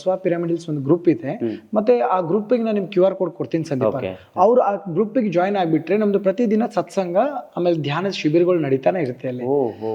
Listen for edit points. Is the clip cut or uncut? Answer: uncut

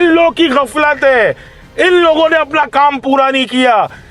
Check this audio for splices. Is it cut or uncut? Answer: uncut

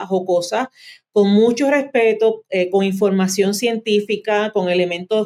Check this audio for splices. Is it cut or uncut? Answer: uncut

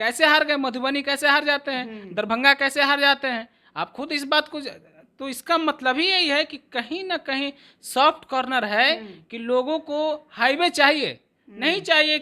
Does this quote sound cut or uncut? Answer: uncut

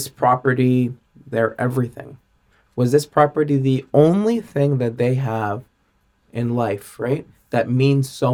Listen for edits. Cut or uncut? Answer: uncut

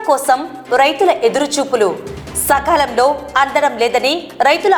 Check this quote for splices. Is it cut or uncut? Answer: uncut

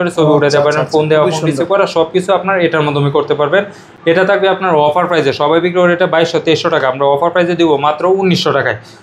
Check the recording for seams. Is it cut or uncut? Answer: uncut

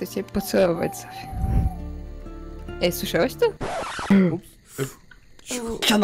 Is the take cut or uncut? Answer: cut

